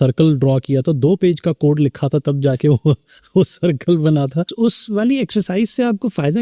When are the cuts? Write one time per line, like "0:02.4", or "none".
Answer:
0:04.5